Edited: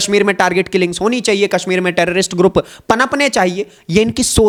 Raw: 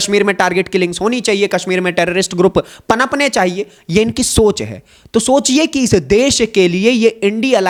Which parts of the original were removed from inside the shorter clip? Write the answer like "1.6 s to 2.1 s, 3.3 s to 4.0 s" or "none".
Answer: none